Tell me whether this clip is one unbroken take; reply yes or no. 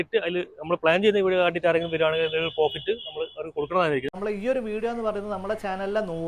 no